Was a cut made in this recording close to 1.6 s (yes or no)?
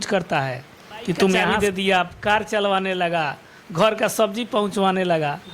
yes